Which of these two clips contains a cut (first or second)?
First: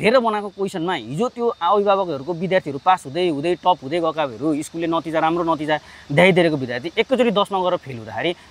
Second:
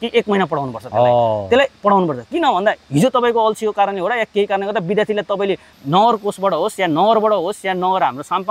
second